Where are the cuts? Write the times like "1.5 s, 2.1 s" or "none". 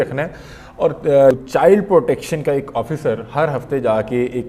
1.4 s

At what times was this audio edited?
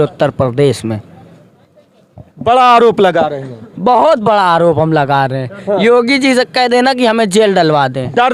none

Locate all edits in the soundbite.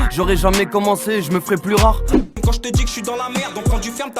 2.2 s

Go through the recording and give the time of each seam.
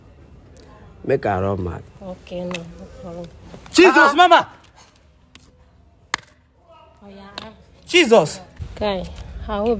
8.6 s

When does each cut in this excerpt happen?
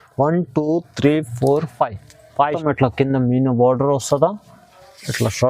2.6 s

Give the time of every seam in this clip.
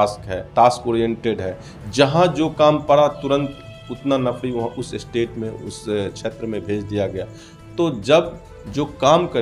none

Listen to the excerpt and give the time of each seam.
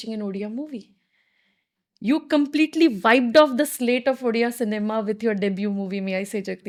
none

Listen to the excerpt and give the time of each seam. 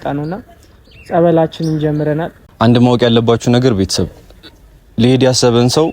2.4 s

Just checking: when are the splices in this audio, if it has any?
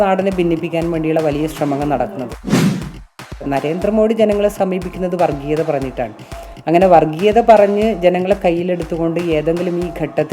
2.3 s, 3.4 s

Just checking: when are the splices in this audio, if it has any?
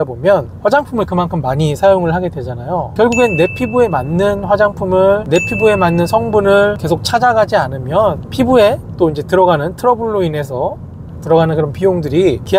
none

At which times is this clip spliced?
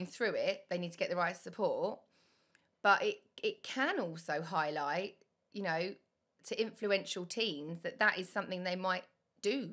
none

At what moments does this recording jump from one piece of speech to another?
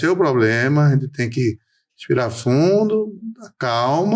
none

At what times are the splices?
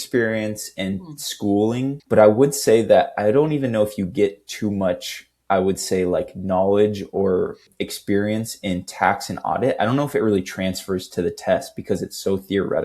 7.7 s

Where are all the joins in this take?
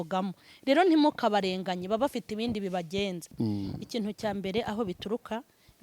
3.3 s

